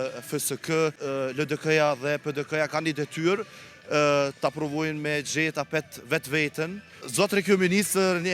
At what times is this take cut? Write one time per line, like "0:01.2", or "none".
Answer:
0:01.0
0:07.1